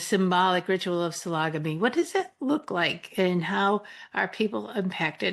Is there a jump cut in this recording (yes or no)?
no